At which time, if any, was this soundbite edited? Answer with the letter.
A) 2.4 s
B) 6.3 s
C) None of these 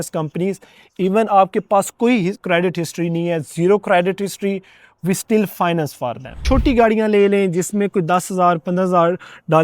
B